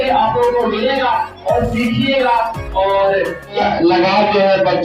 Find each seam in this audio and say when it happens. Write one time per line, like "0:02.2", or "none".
0:03.6